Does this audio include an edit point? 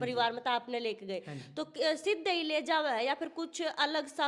no; 0 cuts

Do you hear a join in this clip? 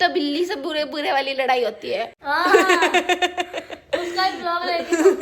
yes; 1 cut; at 2.2 s

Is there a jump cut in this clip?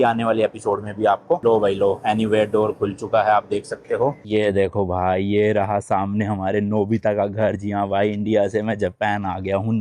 yes; 2 cuts; at 1.4 s, 4.3 s

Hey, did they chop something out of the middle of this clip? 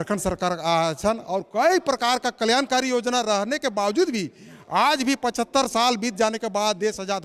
no; 0 cuts

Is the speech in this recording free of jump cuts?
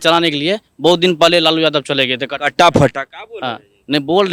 yes; 0 cuts

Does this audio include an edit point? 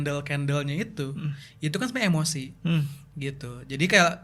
no; 0 cuts

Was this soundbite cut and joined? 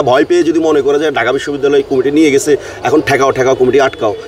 no; 0 cuts

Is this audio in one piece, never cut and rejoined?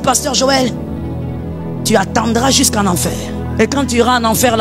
no; 1 cut; at 3.2 s

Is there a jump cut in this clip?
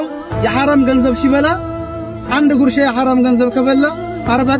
no; 0 cuts

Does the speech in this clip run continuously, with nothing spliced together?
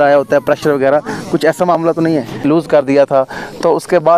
no; 1 cut; at 2.4 s

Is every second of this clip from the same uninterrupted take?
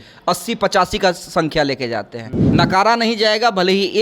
no; 1 cut; at 2.4 s

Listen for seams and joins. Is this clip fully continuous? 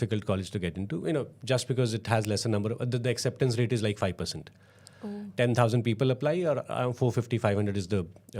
yes; 0 cuts

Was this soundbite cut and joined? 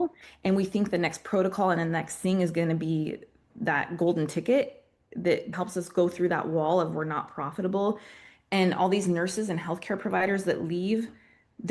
yes; 2 cuts; at 3.5 s, 5.5 s

